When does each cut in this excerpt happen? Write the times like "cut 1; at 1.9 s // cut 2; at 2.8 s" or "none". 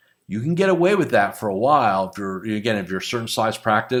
none